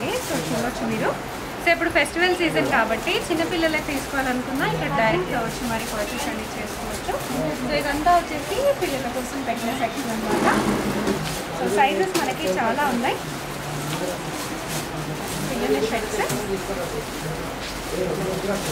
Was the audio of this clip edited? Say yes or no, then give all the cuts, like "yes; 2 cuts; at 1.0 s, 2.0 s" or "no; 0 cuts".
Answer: no; 0 cuts